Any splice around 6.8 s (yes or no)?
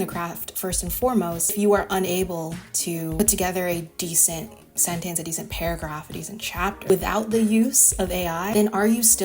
yes